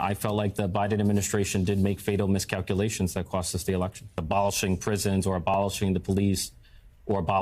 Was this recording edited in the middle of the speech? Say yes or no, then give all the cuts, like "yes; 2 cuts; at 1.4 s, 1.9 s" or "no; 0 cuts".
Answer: yes; 1 cut; at 4.2 s